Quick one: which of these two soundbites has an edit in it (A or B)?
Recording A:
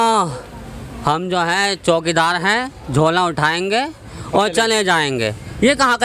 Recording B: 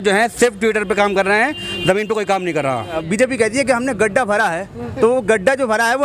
B